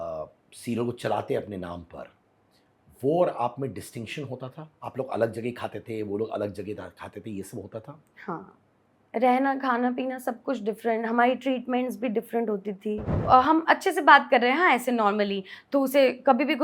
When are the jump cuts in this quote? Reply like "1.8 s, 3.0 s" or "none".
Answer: 13.3 s